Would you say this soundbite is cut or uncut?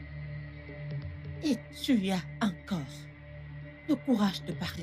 cut